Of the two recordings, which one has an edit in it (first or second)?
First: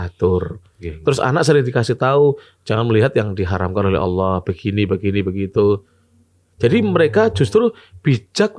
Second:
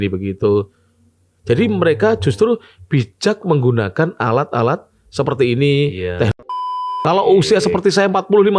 second